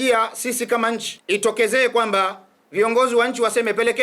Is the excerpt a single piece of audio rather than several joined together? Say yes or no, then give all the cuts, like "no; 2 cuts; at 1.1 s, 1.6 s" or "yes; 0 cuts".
no; 1 cut; at 1.1 s